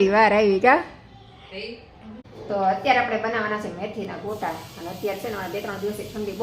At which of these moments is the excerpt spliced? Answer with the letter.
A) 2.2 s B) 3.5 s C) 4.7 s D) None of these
A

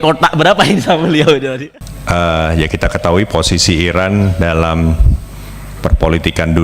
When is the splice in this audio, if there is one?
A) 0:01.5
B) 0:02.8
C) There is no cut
A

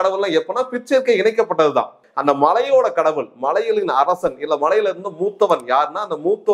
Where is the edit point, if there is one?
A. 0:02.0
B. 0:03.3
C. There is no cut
A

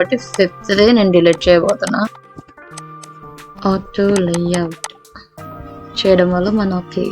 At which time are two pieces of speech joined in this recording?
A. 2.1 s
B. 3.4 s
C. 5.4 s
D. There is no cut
D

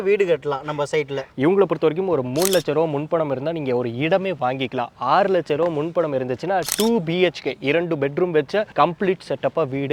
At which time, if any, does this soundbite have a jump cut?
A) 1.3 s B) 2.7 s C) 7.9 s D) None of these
A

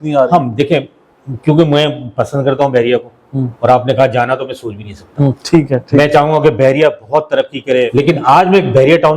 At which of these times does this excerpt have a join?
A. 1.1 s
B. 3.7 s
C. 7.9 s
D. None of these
C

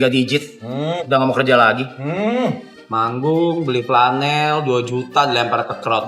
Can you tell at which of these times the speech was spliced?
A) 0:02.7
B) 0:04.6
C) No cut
A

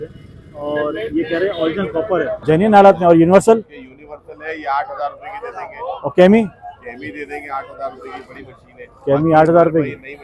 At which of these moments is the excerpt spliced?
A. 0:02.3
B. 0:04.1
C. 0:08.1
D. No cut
A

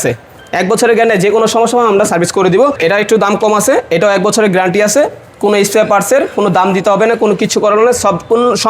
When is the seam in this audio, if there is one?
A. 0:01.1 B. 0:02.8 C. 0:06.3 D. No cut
B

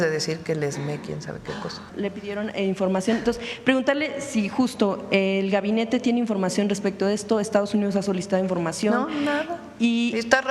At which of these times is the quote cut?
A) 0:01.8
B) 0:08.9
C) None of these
A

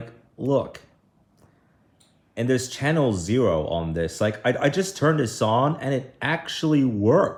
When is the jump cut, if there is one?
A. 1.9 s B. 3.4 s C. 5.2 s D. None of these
D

